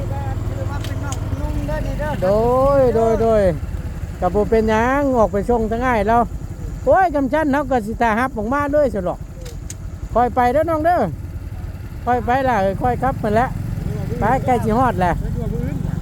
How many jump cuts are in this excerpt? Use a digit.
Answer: 0